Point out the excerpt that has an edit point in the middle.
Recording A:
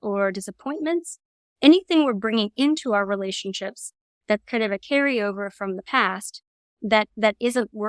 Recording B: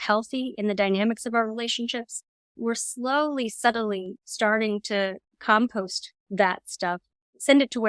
B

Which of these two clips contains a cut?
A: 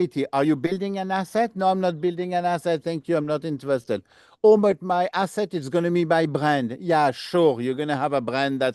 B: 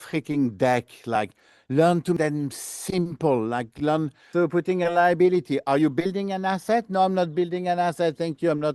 B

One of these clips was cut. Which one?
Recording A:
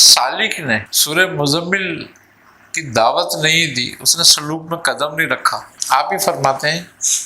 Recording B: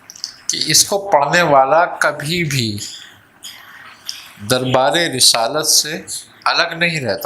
A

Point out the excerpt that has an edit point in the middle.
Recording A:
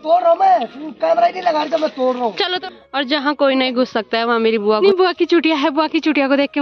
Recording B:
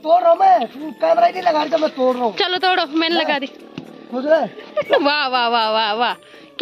A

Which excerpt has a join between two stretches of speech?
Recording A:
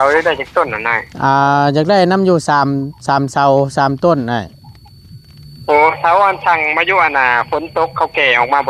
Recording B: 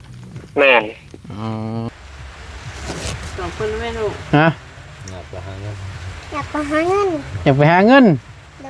B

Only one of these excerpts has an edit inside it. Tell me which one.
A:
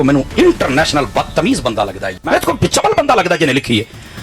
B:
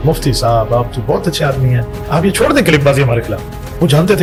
A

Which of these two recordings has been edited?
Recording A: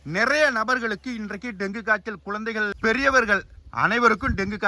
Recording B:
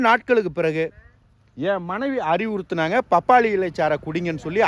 A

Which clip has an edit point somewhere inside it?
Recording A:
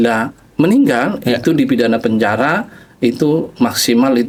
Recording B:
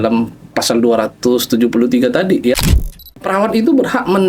B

